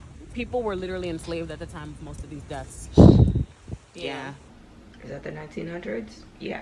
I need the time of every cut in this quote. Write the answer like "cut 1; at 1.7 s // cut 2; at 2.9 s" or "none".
cut 1; at 4.5 s